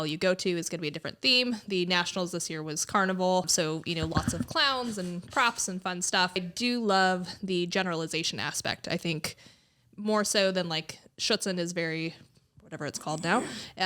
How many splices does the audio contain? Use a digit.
2